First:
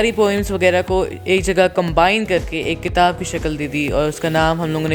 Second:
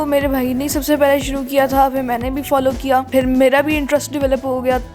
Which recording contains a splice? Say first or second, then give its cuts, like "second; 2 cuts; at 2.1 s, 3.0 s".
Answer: second; 1 cut; at 3.1 s